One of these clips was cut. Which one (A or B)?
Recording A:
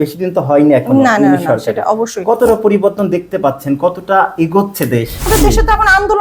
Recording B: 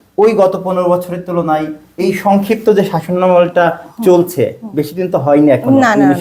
A